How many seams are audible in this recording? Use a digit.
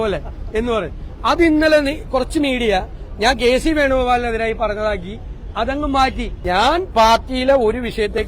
1